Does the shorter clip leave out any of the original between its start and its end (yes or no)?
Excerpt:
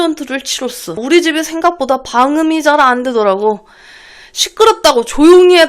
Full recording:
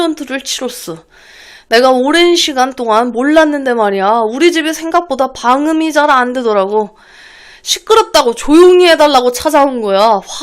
yes